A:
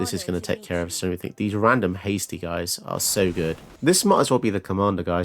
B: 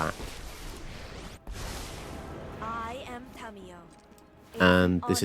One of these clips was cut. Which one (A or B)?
A